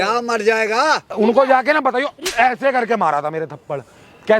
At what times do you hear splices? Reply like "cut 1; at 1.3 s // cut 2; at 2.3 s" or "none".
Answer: cut 1; at 1.1 s